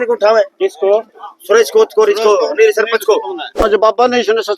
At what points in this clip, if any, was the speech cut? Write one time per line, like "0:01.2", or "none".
0:03.7